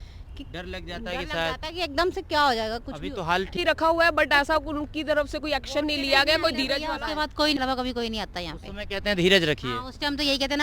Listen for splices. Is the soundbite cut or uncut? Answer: cut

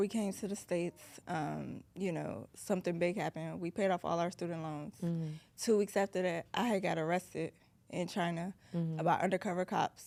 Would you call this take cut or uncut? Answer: uncut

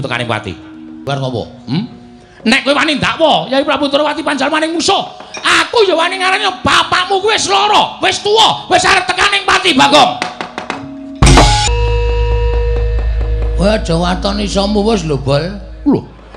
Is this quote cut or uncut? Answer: cut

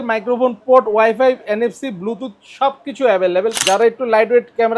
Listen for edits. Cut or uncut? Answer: cut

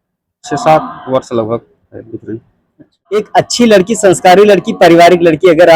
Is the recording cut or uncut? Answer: cut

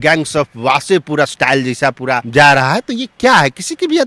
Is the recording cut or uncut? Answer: cut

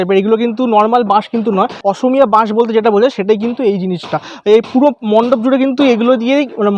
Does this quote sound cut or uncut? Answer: cut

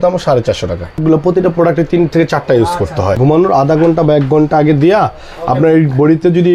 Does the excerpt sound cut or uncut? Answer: cut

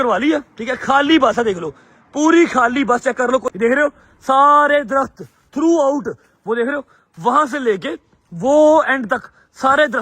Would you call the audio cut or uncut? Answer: cut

